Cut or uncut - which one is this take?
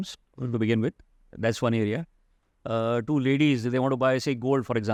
uncut